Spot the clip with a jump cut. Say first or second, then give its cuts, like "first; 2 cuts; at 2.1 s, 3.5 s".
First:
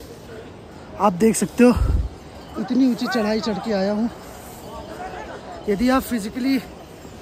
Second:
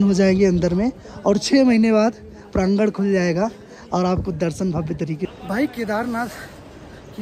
second; 1 cut; at 5.3 s